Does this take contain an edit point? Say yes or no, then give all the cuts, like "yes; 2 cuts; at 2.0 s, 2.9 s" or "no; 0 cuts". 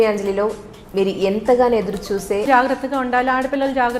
yes; 1 cut; at 2.5 s